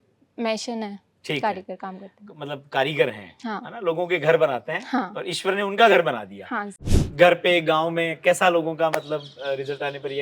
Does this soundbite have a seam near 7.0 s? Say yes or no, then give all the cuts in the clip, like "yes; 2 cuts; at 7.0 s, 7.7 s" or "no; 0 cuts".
yes; 1 cut; at 7.0 s